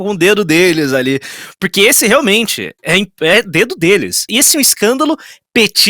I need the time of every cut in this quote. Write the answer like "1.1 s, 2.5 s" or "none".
4.2 s